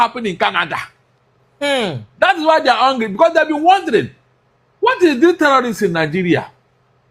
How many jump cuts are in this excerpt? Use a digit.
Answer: 0